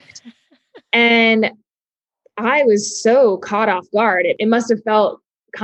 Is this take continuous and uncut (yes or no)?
no